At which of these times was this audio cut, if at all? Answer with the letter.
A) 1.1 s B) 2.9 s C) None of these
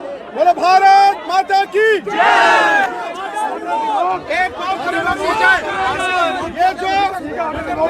B